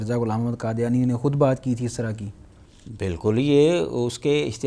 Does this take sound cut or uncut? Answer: uncut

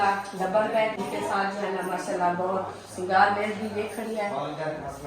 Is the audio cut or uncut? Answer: cut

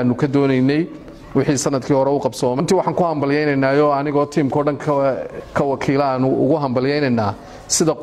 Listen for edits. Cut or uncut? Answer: cut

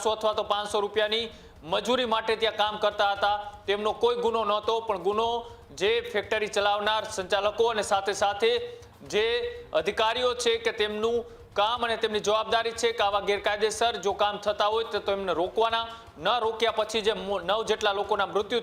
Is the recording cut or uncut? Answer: uncut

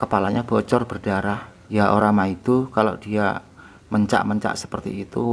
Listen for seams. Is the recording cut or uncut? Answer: cut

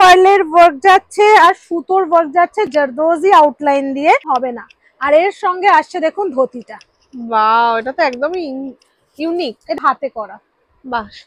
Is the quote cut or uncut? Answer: cut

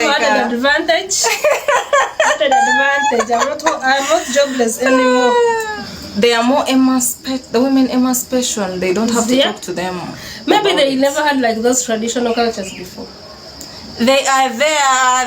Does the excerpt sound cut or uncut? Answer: cut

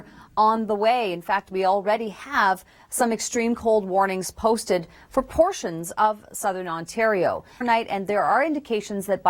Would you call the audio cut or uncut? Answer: cut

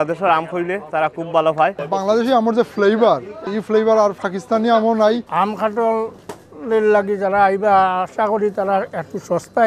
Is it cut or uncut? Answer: cut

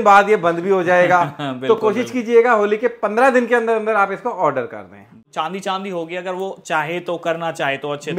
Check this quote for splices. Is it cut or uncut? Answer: cut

